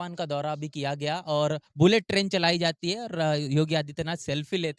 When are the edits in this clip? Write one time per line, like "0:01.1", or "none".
none